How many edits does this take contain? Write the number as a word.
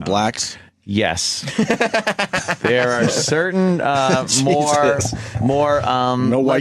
one